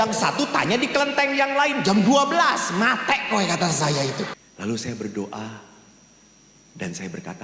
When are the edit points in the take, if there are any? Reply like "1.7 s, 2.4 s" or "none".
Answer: 4.4 s